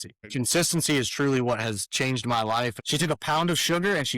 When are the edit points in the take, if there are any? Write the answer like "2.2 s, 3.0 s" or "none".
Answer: 2.8 s